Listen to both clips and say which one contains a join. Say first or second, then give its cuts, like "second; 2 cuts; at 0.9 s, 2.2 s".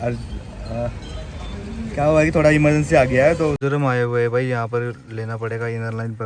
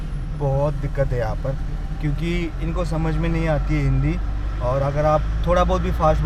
first; 1 cut; at 3.6 s